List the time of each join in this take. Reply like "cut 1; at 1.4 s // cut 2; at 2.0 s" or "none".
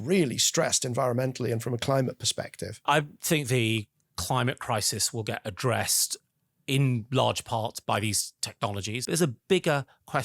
cut 1; at 2.8 s // cut 2; at 7.8 s // cut 3; at 8.9 s

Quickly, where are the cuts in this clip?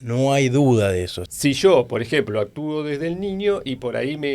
cut 1; at 1.2 s

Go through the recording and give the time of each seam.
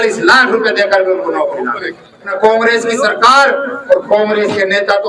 cut 1; at 2.3 s

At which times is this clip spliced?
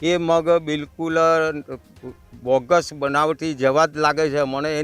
none

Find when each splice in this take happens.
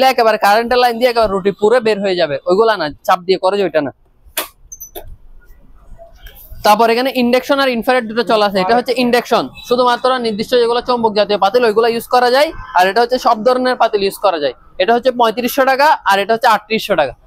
none

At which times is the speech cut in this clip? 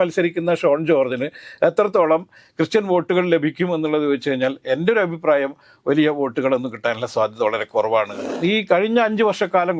cut 1; at 8.3 s

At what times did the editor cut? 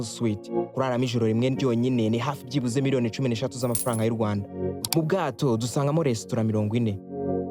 cut 1; at 4.8 s

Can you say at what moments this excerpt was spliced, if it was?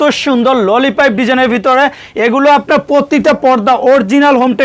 none

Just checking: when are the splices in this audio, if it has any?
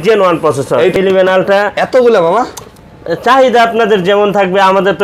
cut 1; at 0.9 s

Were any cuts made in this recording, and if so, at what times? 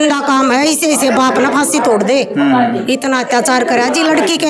none

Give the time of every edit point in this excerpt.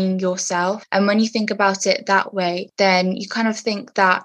cut 1; at 0.8 s // cut 2; at 2.7 s

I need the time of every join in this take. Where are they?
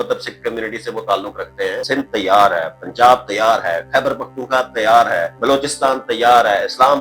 cut 1; at 1.8 s // cut 2; at 5.3 s

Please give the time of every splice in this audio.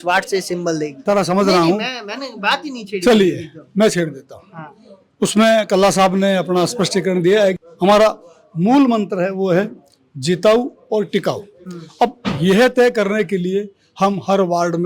cut 1; at 1.0 s // cut 2; at 7.6 s

